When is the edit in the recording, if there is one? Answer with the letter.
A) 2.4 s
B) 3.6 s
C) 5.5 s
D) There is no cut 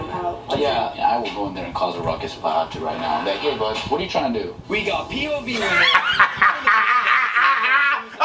D